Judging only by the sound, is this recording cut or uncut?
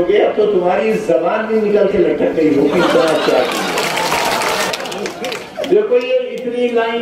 cut